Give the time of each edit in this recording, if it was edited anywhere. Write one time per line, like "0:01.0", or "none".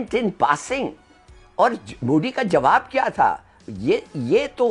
none

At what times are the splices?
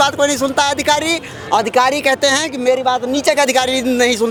none

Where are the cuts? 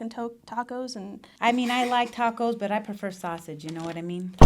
0:01.3

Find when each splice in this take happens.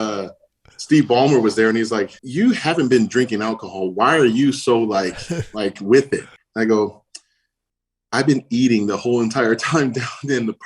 0:02.2
0:06.4

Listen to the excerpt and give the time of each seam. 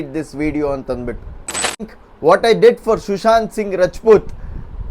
0:01.9

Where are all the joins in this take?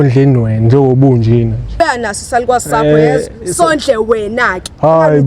0:01.7

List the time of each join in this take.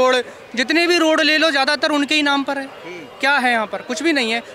none

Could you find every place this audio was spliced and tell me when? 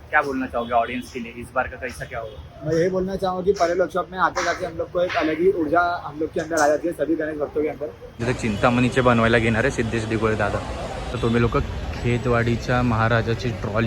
0:08.2
0:11.1

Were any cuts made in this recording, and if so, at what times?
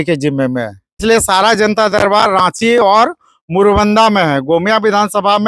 0:01.0

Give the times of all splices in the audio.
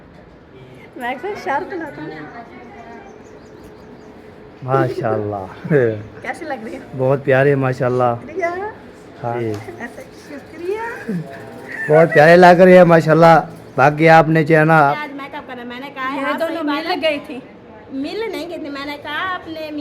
0:04.6
0:09.4
0:14.9

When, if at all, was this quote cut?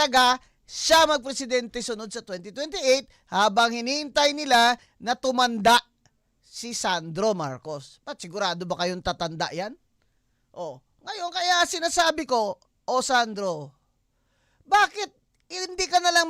none

